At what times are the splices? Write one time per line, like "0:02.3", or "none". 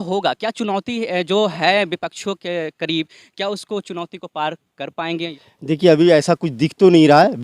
0:05.3